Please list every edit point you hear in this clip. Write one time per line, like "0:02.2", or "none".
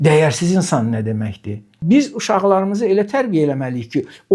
0:01.7